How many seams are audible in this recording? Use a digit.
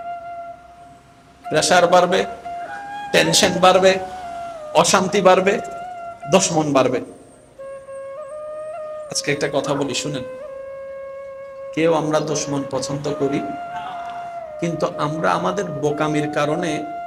0